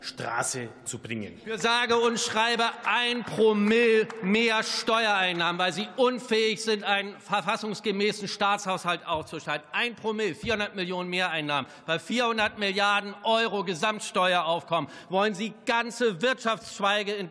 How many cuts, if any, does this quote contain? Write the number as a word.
one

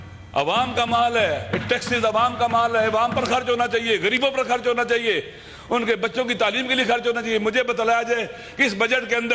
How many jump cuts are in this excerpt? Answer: zero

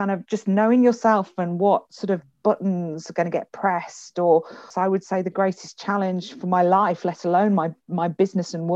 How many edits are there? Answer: one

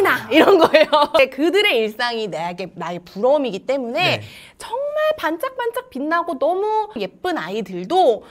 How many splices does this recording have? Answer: zero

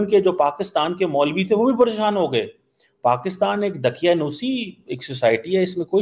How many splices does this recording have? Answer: zero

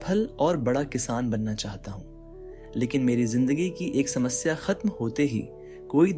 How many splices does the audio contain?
one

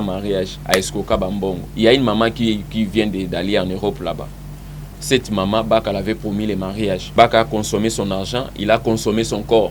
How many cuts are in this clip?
two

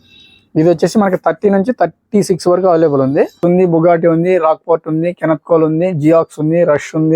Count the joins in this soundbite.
one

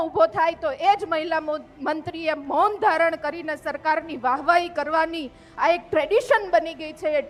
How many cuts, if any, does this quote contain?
zero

